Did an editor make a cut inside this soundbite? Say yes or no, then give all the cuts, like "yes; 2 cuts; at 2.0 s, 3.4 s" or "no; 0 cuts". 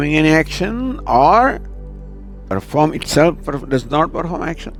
no; 0 cuts